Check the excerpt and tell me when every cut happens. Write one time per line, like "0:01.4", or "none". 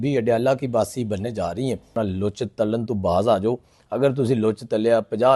0:01.9